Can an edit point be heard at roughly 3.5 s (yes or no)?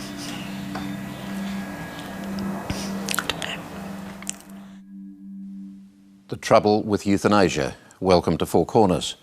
yes